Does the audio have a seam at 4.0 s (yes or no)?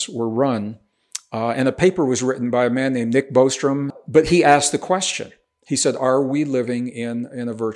yes